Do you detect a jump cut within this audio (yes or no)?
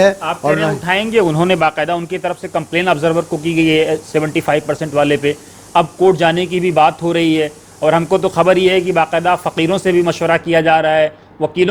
no